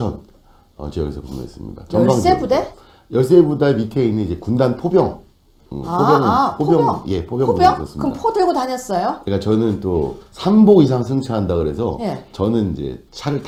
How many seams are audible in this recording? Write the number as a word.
zero